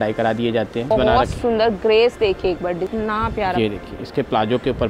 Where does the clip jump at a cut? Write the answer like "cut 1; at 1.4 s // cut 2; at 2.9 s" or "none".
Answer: cut 1; at 0.9 s // cut 2; at 2.9 s